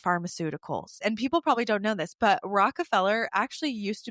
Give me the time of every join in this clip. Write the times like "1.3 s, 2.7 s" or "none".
1.0 s